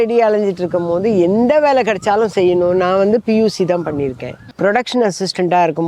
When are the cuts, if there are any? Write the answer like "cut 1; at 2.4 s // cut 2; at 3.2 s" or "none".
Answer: cut 1; at 4.5 s